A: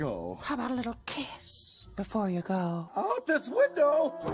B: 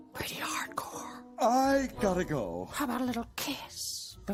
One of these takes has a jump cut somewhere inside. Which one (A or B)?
A